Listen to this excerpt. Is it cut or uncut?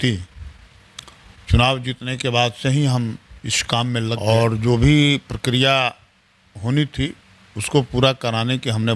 cut